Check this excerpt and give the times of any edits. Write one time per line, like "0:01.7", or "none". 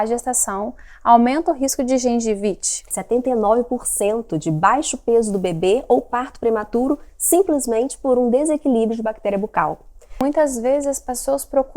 0:02.9
0:10.2